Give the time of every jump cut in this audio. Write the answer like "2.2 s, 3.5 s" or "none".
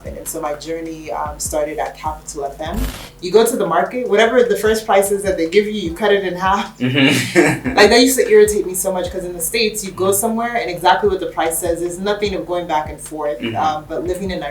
3.0 s